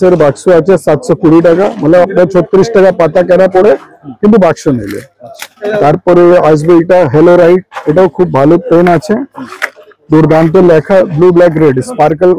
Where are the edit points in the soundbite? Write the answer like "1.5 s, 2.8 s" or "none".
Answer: none